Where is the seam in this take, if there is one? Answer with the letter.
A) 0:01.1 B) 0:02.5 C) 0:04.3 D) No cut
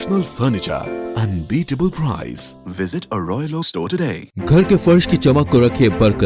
C